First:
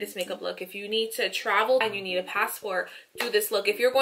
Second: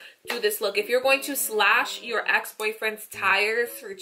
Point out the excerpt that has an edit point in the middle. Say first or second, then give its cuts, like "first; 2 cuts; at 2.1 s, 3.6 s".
first; 1 cut; at 1.8 s